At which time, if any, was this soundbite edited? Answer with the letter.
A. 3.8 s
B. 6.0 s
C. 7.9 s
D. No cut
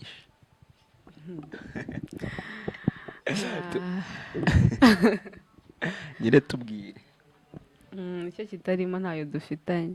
D